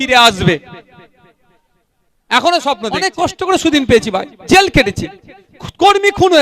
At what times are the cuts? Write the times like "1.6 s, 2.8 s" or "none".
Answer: 3.1 s